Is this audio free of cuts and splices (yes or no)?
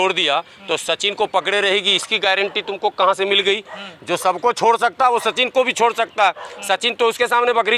yes